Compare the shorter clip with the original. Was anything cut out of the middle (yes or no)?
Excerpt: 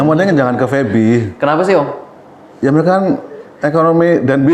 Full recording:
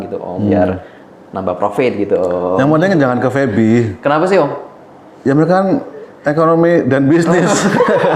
no